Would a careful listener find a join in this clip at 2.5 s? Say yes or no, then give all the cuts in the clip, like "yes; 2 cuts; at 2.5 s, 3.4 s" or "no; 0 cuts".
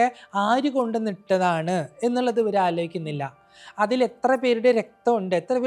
no; 0 cuts